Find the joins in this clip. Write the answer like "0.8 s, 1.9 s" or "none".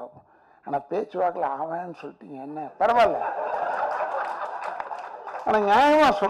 none